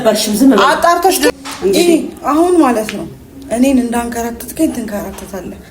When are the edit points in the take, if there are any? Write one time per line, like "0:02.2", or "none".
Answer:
0:01.3